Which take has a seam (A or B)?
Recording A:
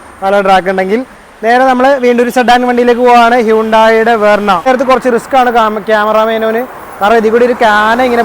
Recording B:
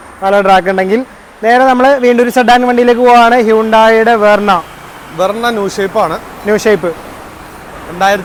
A